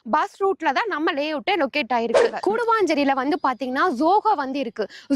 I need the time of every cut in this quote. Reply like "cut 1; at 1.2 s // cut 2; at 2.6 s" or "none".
cut 1; at 2.4 s